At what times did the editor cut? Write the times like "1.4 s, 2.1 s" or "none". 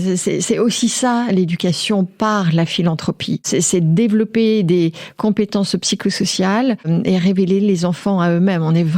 3.4 s, 6.9 s